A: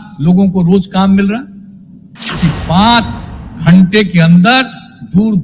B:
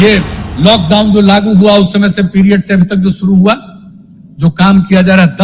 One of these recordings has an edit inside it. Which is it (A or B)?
A